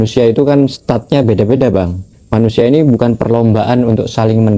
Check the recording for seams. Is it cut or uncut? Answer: uncut